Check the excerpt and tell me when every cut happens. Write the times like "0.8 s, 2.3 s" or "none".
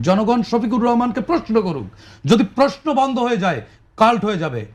none